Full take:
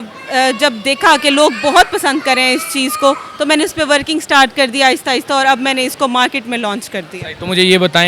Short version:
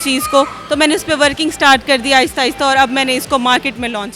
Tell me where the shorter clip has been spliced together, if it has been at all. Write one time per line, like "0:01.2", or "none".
none